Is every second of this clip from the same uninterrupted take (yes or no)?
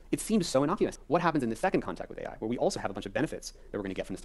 no